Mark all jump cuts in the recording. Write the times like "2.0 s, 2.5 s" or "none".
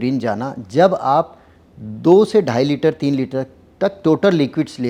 none